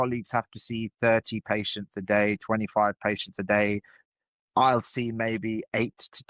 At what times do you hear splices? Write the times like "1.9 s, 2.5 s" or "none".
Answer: 4.0 s